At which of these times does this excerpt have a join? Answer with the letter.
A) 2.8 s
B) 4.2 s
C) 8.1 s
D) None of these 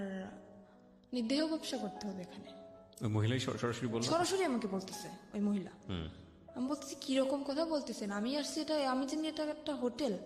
D